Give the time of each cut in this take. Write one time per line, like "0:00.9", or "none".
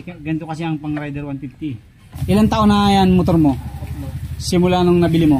0:02.1